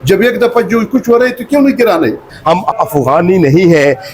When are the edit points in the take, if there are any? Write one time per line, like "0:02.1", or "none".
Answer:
0:02.3